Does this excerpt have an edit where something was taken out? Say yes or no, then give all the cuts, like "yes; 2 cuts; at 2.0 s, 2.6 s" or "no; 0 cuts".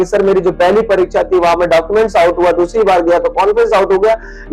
no; 0 cuts